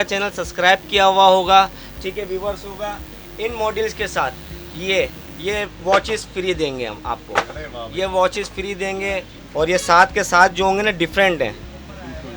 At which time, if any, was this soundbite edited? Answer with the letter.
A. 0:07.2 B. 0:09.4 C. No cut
B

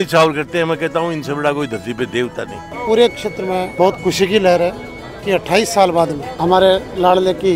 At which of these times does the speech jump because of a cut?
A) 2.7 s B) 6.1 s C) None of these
A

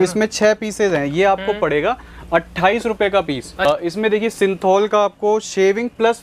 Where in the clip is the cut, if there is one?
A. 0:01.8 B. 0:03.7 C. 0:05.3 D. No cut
B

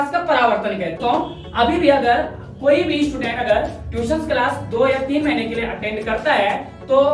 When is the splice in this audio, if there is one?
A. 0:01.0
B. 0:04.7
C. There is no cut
A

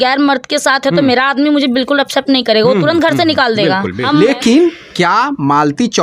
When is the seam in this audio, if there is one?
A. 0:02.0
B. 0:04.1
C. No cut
B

